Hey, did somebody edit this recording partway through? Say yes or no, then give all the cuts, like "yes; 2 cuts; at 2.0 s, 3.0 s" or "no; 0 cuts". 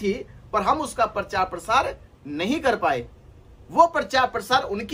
no; 0 cuts